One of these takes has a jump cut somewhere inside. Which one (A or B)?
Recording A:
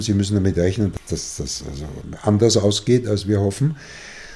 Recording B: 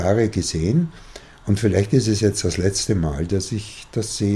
A